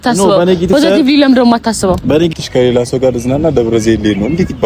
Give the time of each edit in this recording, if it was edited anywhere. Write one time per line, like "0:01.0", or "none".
0:02.3